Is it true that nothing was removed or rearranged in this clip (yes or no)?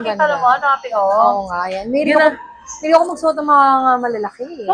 yes